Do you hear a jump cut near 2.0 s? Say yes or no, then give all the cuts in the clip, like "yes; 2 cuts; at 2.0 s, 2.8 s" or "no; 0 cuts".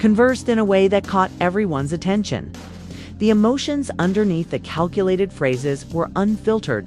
yes; 2 cuts; at 0.9 s, 2.0 s